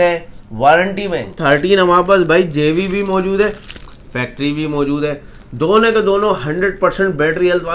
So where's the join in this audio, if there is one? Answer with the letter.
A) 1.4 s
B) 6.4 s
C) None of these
A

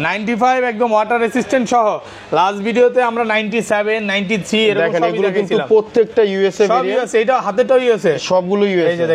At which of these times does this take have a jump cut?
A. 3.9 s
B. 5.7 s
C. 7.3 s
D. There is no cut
D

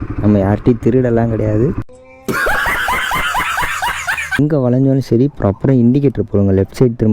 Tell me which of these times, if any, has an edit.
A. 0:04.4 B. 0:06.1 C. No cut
A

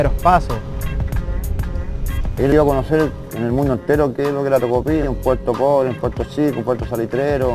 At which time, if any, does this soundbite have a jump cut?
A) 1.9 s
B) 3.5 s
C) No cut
A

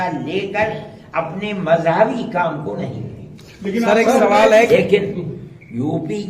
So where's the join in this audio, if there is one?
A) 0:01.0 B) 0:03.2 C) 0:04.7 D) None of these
C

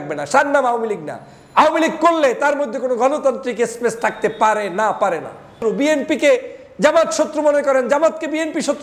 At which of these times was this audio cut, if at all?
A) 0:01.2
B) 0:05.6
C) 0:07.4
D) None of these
B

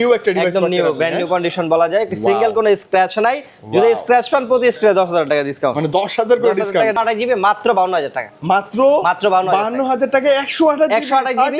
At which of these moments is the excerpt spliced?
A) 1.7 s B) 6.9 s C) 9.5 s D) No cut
B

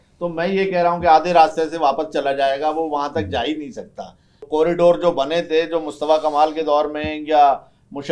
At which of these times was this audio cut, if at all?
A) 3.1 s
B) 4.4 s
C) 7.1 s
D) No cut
B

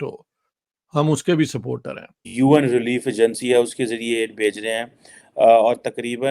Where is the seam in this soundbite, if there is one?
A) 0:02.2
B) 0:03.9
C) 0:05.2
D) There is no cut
A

